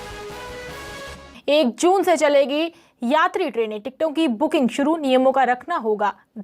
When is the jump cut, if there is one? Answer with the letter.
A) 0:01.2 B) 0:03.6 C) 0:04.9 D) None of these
A